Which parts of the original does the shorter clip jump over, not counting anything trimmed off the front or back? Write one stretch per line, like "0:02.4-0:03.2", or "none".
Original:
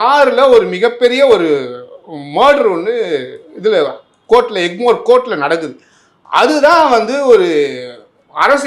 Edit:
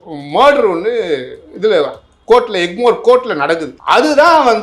0:05.7-0:06.2